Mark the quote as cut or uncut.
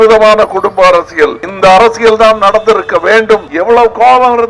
cut